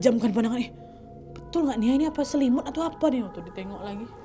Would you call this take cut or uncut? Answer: uncut